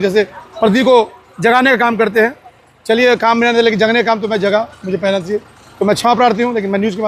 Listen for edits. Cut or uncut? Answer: uncut